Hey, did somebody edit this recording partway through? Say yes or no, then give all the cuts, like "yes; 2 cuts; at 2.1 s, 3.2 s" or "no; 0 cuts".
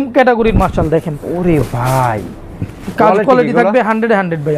no; 0 cuts